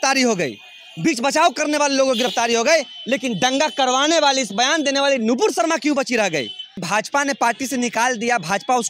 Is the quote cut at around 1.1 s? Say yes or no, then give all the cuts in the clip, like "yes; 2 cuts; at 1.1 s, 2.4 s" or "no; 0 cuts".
no; 1 cut; at 6.8 s